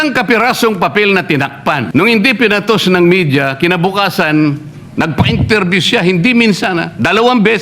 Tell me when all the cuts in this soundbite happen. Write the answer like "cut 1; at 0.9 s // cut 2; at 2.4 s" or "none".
cut 1; at 1.9 s

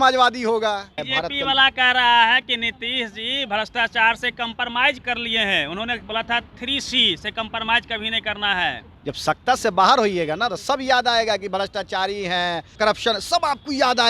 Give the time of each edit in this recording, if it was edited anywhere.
cut 1; at 1.0 s // cut 2; at 5.0 s // cut 3; at 8.9 s // cut 4; at 12.8 s

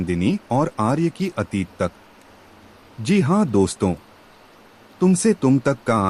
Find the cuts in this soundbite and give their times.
none

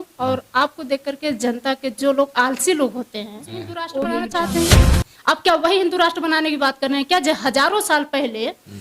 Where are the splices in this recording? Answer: cut 1; at 3.9 s

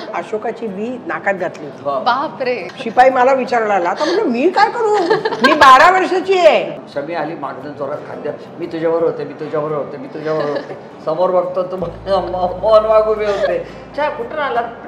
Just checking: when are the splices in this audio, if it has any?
cut 1; at 2.6 s // cut 2; at 6.8 s // cut 3; at 13.8 s

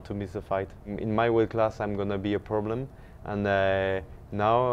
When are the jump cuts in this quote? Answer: cut 1; at 1.0 s

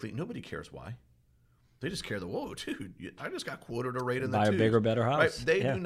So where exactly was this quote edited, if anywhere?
none

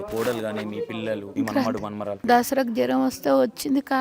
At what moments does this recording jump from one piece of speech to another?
cut 1; at 1.3 s // cut 2; at 2.2 s

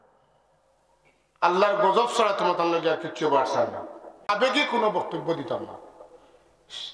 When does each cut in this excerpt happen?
cut 1; at 4.3 s

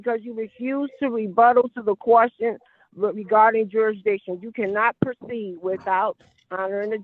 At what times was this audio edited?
none

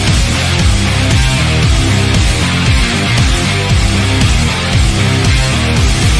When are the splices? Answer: none

